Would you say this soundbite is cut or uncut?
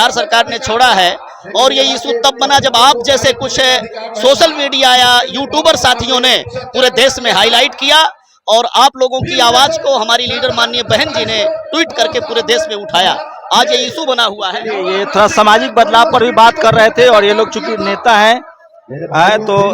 uncut